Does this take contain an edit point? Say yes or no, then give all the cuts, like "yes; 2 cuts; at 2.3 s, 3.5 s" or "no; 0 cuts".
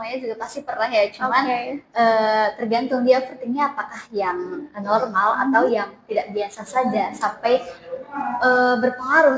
no; 0 cuts